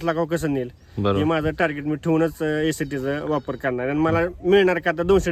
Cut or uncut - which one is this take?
uncut